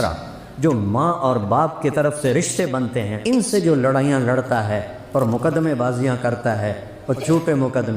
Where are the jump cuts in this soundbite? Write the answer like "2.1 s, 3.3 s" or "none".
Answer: 3.1 s